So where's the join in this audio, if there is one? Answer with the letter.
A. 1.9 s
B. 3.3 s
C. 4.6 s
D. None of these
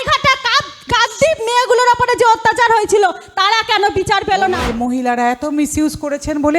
C